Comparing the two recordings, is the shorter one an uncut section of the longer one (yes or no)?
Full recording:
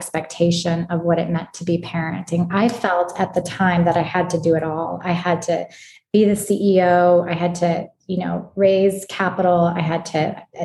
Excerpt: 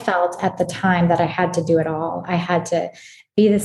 yes